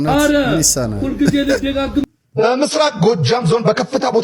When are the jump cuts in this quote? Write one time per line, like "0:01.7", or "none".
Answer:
0:02.1

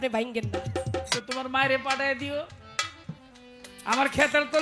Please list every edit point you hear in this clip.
0:01.1

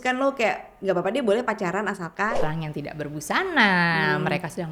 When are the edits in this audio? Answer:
0:02.3

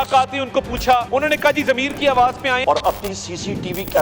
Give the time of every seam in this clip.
0:01.1
0:02.6

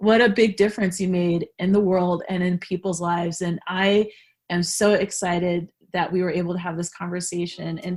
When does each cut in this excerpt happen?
none

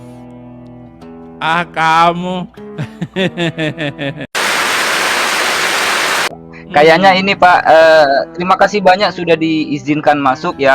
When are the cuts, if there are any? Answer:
0:04.3
0:06.3

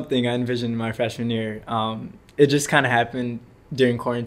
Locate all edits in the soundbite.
none

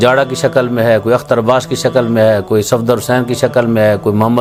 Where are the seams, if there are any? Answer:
none

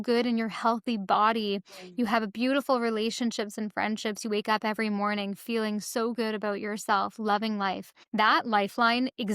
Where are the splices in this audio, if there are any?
none

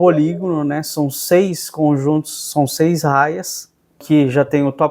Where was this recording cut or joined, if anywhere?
0:04.0

